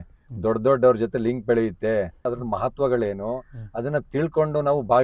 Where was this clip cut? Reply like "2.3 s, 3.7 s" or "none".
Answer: 2.3 s